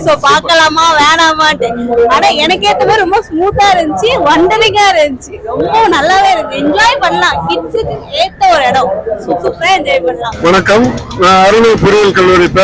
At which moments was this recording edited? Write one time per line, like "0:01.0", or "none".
0:10.3